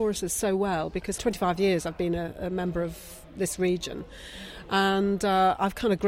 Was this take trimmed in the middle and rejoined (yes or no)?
yes